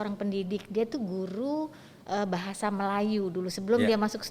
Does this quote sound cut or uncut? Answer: uncut